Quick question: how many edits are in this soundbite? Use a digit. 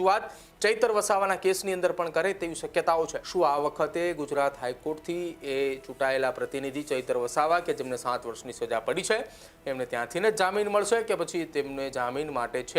1